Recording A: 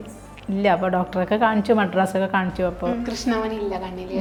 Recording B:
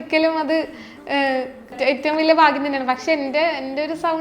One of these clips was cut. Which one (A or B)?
B